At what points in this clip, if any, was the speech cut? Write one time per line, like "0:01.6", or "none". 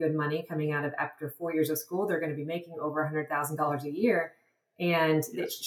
none